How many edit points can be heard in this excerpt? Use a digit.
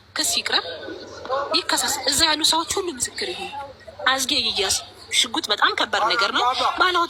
0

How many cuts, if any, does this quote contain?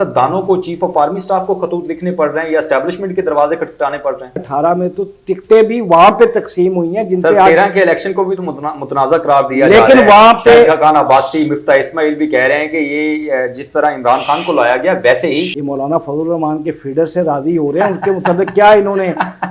2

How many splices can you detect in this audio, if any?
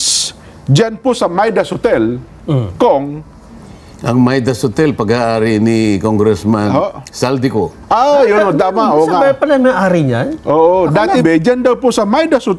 2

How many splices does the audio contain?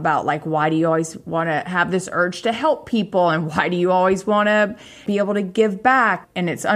1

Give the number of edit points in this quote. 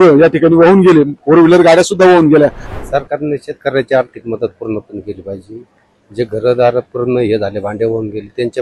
1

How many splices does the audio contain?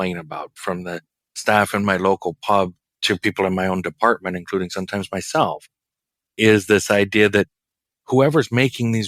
1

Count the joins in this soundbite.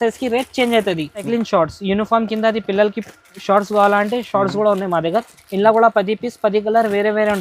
1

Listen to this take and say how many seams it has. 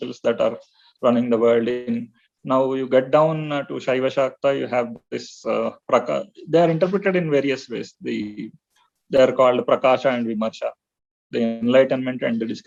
0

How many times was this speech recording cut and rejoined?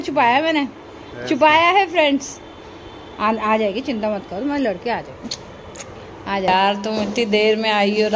1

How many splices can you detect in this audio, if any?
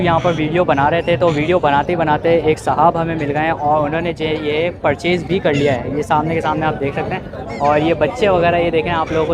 0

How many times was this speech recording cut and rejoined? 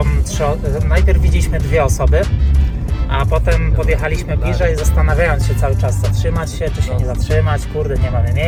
0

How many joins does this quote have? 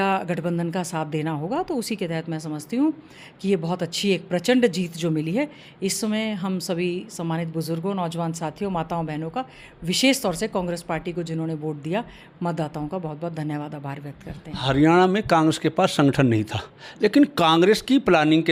0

